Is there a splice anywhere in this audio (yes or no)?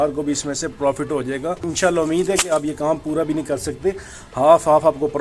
yes